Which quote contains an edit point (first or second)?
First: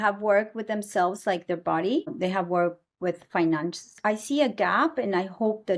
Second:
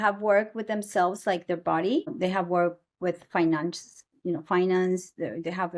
first